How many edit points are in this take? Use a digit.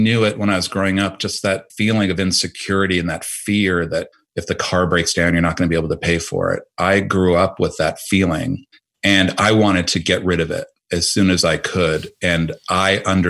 0